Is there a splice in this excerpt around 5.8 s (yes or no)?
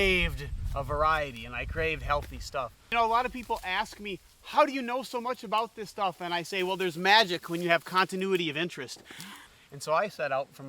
no